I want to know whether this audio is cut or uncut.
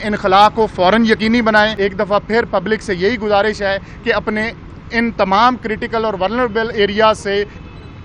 cut